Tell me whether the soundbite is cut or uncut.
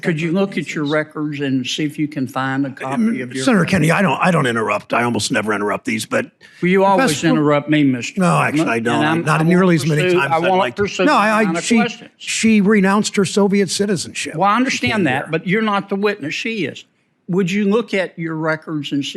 uncut